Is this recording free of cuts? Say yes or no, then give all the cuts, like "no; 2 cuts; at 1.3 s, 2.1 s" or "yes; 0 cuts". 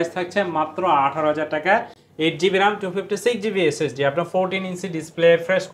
yes; 0 cuts